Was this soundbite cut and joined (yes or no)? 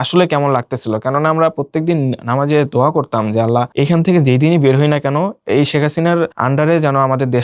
yes